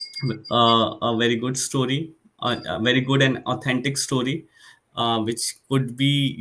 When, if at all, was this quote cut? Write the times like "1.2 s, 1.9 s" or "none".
none